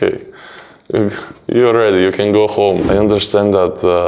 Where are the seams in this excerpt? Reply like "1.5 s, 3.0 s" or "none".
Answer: 2.8 s

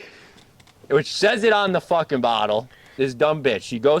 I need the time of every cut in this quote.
3.0 s

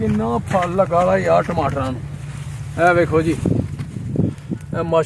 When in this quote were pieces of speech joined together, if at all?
none

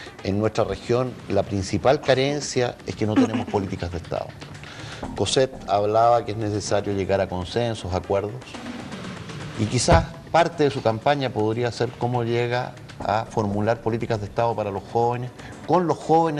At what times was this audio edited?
none

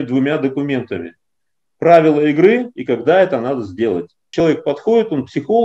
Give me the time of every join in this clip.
4.4 s

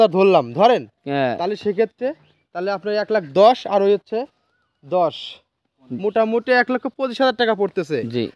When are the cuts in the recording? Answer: none

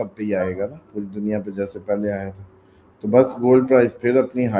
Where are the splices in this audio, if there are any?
none

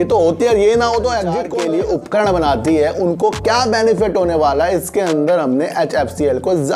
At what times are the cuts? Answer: 1.5 s

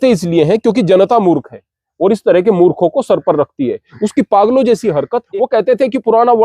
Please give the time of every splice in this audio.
5.2 s

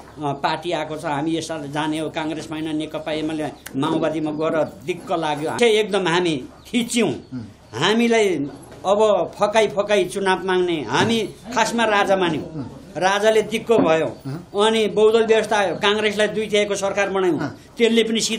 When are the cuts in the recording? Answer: 5.6 s

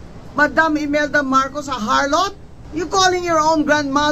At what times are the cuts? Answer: 2.1 s

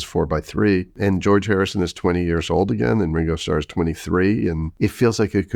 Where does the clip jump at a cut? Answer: 0.9 s, 4.7 s

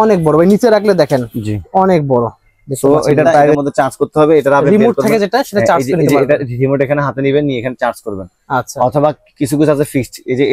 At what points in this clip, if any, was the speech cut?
3.6 s

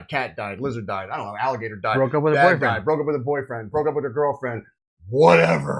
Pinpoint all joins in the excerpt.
none

